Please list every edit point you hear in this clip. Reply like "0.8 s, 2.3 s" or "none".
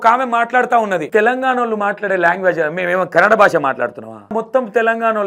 1.1 s, 4.3 s